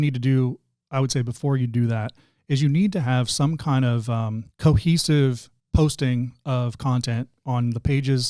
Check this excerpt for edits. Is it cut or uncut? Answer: cut